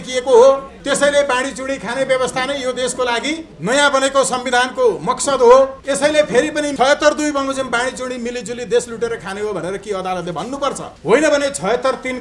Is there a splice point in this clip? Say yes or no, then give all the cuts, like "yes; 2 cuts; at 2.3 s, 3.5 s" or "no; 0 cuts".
no; 0 cuts